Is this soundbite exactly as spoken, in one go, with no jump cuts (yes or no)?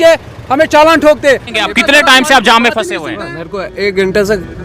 no